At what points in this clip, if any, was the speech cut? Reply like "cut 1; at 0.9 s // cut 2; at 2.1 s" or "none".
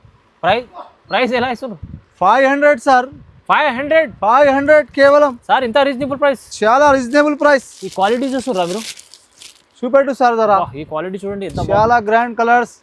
none